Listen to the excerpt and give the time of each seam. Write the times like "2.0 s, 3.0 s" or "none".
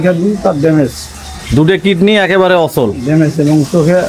none